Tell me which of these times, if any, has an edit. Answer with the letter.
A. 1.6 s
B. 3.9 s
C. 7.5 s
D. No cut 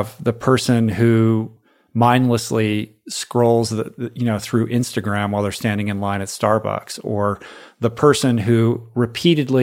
A